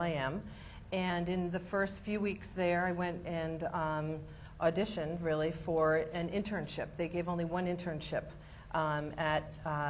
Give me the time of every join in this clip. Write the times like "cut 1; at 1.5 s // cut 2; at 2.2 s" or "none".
none